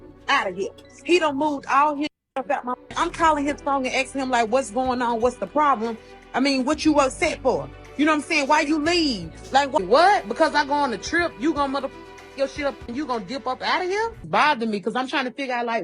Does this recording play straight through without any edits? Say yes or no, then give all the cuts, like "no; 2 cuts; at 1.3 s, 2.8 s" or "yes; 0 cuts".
no; 3 cuts; at 2.9 s, 9.8 s, 14.2 s